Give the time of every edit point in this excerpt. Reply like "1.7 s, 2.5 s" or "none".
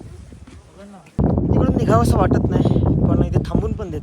1.1 s